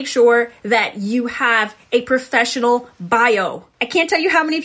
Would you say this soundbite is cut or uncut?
uncut